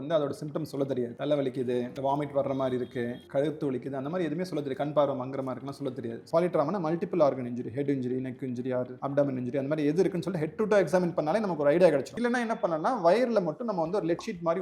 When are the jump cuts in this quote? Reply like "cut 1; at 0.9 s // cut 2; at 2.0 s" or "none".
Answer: cut 1; at 6.2 s // cut 2; at 12.1 s

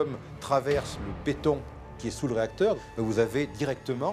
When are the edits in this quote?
cut 1; at 2.9 s

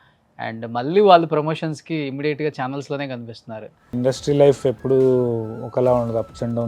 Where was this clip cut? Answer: cut 1; at 4.0 s

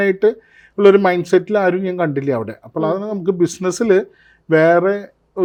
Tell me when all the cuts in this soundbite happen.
none

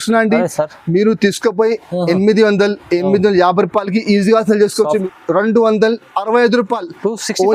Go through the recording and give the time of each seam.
cut 1; at 5.0 s

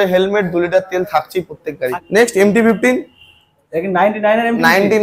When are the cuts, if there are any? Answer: cut 1; at 2.0 s

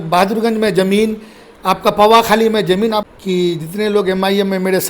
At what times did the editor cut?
cut 1; at 3.1 s

